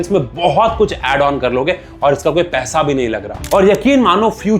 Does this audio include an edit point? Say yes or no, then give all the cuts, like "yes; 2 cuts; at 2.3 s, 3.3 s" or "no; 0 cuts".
yes; 1 cut; at 3.3 s